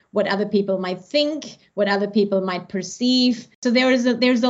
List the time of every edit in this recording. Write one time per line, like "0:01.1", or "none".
0:03.6